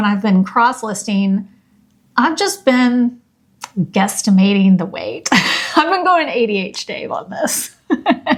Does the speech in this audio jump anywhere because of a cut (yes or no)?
no